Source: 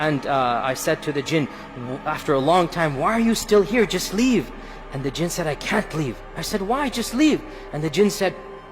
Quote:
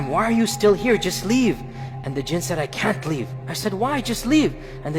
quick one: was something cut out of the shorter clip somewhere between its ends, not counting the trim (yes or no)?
no